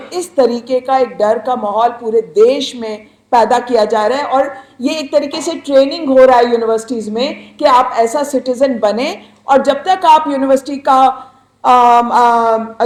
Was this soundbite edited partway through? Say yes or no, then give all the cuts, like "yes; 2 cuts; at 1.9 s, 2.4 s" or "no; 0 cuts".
no; 0 cuts